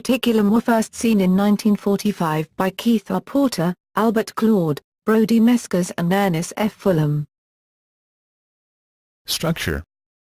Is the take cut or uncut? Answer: uncut